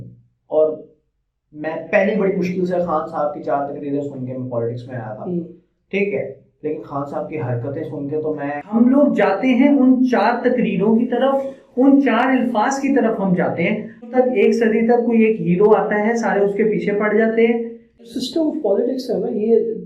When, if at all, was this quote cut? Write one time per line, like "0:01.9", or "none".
0:08.6
0:14.1
0:18.0